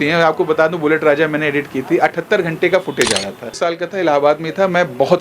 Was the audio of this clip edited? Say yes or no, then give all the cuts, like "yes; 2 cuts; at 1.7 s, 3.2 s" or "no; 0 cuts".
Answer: yes; 1 cut; at 3.5 s